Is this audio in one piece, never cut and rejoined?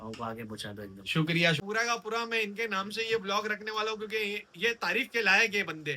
no; 1 cut; at 1.6 s

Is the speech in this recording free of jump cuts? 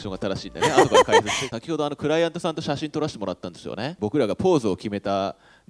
no; 2 cuts; at 1.4 s, 4.0 s

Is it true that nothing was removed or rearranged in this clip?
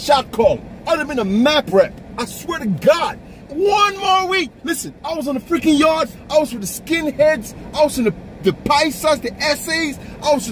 yes; 0 cuts

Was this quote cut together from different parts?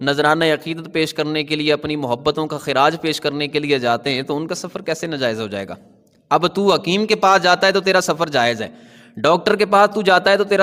no; 0 cuts

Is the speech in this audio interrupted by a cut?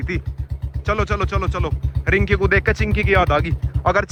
no; 0 cuts

